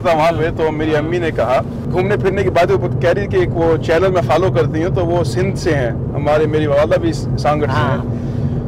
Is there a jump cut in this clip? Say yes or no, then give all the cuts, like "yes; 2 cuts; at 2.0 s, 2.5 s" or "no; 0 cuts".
yes; 1 cut; at 1.8 s